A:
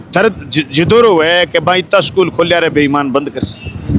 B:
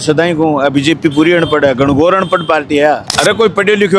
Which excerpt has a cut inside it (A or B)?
B